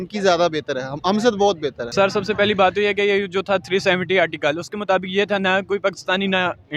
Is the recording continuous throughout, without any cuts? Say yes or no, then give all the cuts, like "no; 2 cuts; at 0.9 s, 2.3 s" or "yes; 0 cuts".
no; 1 cut; at 1.8 s